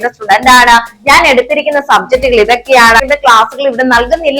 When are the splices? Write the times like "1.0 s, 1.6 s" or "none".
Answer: 3.0 s

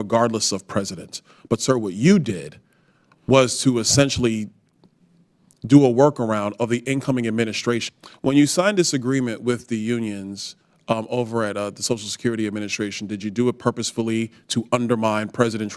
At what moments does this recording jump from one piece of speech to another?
7.9 s

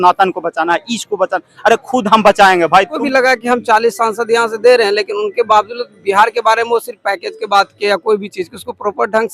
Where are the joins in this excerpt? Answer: 3.0 s

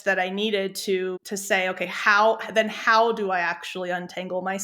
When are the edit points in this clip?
1.3 s

